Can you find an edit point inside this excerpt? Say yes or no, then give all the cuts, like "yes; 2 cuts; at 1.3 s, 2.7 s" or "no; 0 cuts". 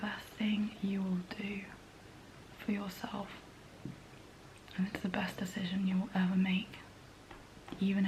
no; 0 cuts